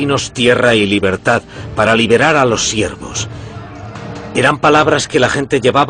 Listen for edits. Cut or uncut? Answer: uncut